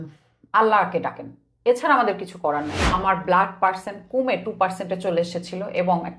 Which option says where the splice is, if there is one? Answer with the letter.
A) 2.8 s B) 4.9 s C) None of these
A